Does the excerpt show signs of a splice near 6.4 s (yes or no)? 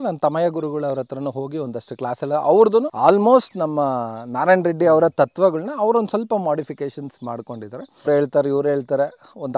no